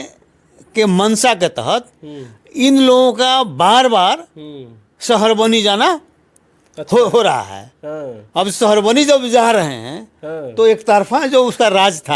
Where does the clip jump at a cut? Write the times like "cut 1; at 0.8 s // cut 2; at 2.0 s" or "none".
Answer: none